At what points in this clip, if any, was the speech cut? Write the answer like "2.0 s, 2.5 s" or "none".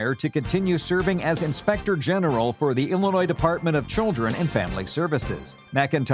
none